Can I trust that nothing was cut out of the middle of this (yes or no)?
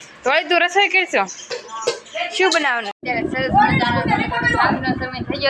no